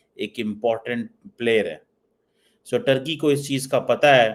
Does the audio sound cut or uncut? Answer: uncut